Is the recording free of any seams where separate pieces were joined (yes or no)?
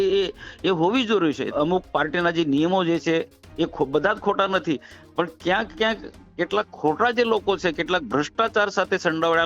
no